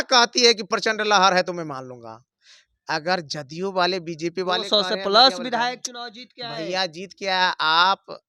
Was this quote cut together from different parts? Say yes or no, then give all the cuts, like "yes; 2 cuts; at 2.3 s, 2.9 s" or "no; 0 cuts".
no; 0 cuts